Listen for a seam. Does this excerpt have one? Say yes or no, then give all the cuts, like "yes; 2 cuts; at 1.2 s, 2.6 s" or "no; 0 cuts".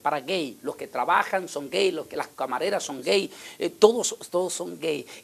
yes; 1 cut; at 3.3 s